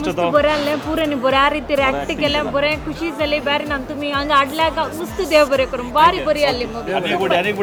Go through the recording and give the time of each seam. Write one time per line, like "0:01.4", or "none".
none